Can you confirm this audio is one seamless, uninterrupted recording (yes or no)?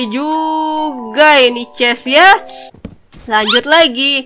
no